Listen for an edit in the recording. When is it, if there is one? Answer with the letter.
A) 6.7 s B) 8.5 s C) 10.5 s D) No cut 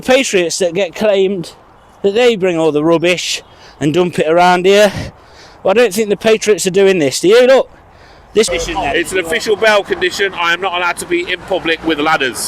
B